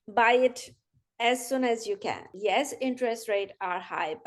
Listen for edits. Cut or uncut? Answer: cut